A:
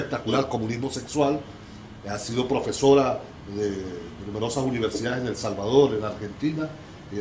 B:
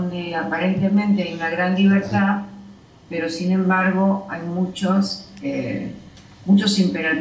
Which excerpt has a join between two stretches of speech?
A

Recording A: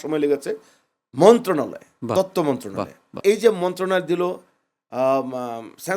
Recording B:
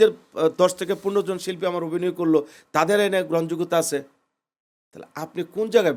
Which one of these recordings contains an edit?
A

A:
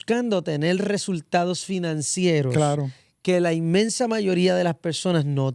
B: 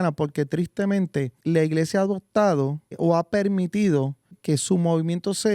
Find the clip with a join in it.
B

